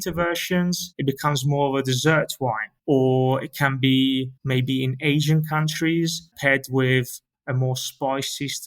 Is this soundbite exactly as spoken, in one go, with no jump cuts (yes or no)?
no